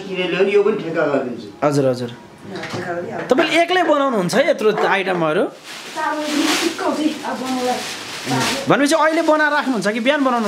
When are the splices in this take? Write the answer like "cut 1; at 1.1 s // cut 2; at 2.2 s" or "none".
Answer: none